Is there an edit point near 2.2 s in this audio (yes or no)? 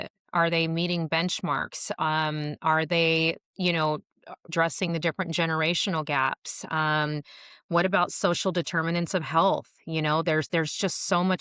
no